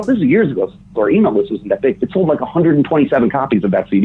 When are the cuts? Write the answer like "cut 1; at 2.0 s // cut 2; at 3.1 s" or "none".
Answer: none